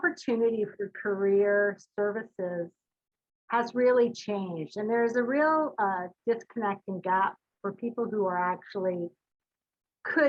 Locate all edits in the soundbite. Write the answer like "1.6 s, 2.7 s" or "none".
none